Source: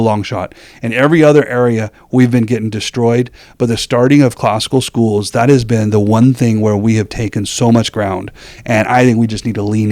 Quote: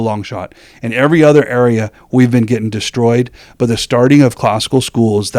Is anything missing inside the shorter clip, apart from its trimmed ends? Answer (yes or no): no